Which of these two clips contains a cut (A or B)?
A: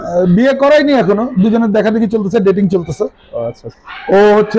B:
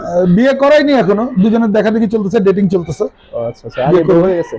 A